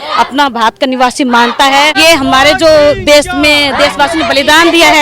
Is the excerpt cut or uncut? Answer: cut